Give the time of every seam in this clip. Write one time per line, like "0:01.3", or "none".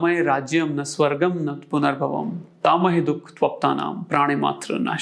none